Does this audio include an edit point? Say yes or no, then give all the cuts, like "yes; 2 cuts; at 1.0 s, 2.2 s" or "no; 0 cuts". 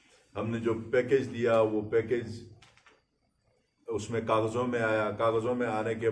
no; 0 cuts